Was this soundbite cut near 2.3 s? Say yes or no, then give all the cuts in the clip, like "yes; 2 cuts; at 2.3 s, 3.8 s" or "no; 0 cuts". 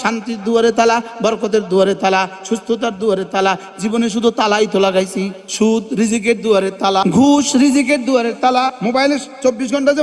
no; 3 cuts; at 5.4 s, 7.0 s, 8.8 s